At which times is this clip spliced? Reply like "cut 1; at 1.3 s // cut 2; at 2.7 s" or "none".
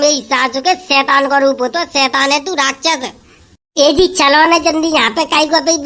none